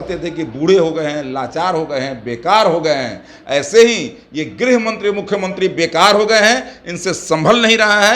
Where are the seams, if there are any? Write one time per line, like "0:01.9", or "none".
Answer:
none